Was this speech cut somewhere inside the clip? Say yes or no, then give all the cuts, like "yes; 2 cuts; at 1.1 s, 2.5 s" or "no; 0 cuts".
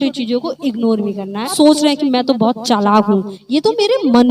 yes; 1 cut; at 1.5 s